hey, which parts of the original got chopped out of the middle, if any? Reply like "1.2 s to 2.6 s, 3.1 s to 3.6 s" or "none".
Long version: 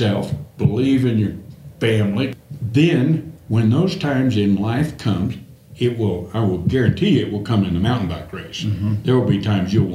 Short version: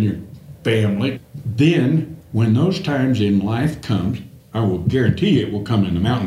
5.6 s to 6.3 s